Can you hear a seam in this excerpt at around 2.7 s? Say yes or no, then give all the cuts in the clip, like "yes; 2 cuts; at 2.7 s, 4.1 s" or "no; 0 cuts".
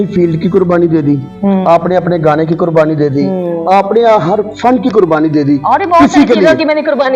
no; 0 cuts